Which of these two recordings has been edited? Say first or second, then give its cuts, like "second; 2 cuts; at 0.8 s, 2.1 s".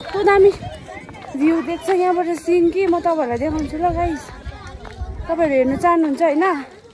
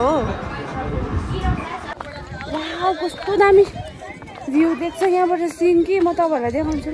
second; 1 cut; at 1.9 s